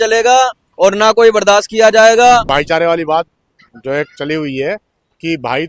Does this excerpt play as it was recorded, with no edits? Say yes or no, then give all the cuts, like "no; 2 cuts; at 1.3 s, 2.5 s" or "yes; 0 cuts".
no; 1 cut; at 2.5 s